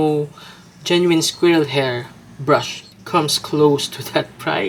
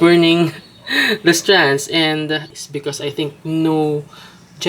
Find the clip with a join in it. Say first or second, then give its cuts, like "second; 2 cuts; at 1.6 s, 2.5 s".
second; 1 cut; at 2.5 s